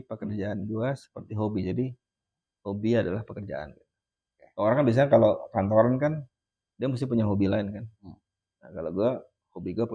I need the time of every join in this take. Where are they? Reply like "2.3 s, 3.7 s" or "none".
none